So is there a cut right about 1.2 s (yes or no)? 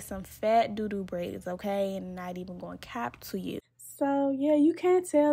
no